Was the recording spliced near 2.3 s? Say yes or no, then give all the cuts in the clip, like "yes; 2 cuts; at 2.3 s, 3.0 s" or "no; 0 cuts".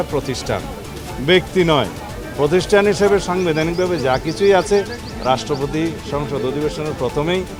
no; 0 cuts